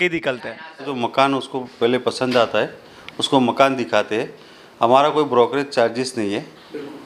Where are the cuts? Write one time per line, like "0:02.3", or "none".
0:00.9